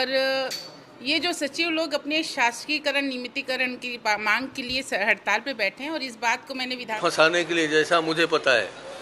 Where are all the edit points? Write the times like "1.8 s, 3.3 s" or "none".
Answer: 7.0 s